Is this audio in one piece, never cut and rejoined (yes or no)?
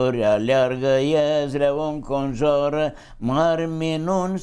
yes